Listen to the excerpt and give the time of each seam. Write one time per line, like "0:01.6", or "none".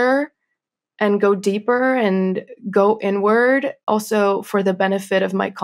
0:03.8